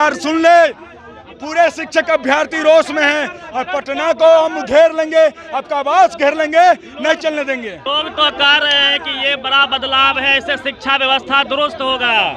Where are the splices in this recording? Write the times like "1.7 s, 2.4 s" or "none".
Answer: 7.8 s